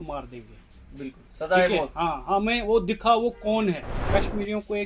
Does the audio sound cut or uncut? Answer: cut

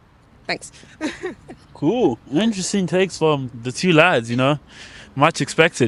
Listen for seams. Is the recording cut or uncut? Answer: uncut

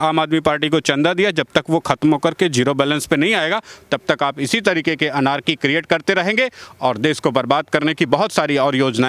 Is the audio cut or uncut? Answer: uncut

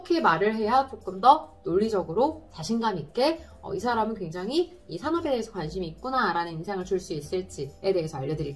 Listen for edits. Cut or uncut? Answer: uncut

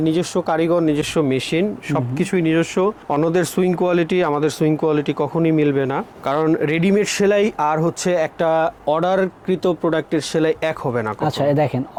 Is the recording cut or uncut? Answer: uncut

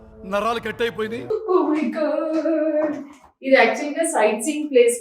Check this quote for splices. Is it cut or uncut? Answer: cut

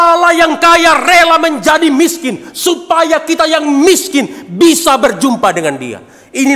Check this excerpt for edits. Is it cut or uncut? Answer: uncut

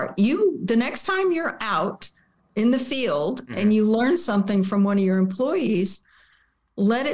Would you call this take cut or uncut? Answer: uncut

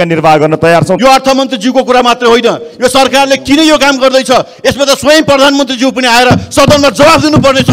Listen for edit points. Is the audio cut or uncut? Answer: cut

